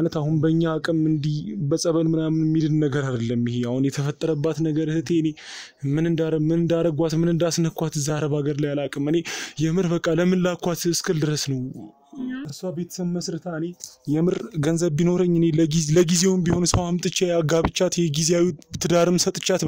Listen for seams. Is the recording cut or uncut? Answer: cut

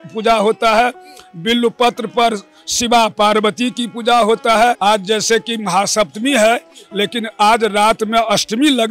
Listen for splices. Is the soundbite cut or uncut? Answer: cut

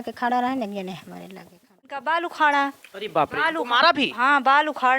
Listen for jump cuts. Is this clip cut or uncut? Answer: cut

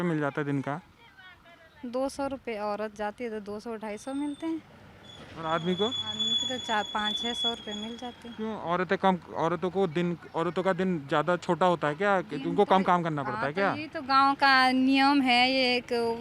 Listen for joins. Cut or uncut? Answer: uncut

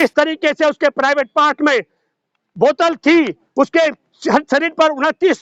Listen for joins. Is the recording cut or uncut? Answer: uncut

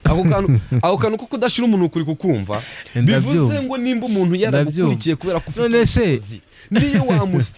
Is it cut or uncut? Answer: uncut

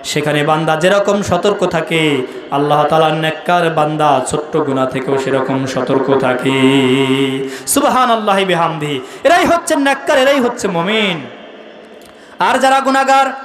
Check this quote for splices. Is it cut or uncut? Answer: uncut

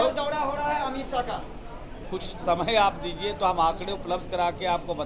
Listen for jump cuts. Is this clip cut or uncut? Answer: cut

